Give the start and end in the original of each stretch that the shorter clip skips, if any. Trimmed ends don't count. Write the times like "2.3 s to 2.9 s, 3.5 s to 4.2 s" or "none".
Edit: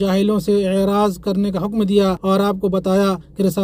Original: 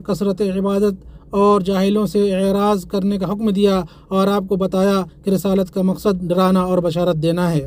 3.9 s to 4.1 s